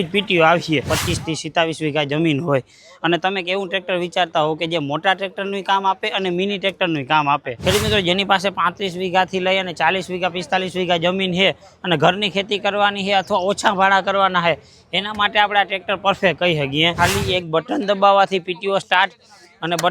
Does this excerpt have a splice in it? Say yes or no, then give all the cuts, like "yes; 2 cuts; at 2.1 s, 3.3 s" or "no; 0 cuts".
yes; 3 cuts; at 0.9 s, 7.5 s, 16.9 s